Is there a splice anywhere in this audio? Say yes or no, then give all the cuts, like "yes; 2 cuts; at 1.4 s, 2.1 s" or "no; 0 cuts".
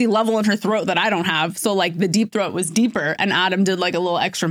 no; 0 cuts